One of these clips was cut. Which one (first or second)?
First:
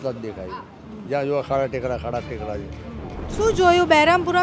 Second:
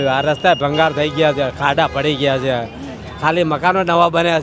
first